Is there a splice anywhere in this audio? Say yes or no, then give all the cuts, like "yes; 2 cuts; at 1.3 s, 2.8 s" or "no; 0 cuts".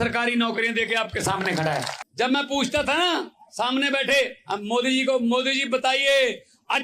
yes; 1 cut; at 2.0 s